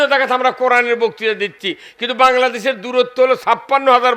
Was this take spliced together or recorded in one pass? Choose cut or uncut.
uncut